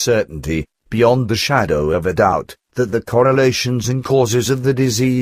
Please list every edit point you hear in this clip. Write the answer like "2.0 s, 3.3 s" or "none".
none